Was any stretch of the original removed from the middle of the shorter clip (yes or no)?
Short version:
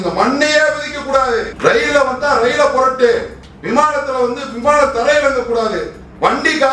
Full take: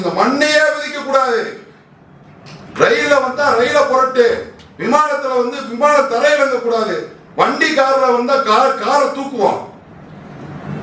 yes